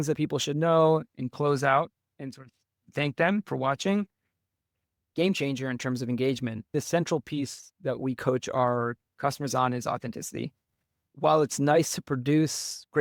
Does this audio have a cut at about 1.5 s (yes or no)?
no